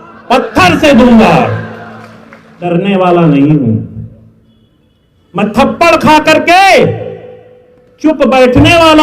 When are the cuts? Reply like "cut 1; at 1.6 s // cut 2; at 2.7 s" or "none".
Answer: cut 1; at 2.6 s